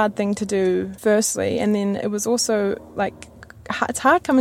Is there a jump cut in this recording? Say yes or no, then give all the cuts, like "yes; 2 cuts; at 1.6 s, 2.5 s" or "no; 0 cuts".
no; 0 cuts